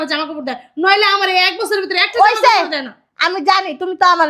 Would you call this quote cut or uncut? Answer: uncut